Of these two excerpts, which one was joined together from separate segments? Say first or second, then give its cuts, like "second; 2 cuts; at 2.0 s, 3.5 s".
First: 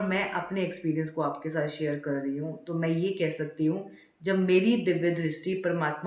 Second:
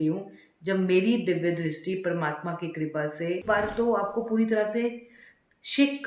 second; 1 cut; at 3.4 s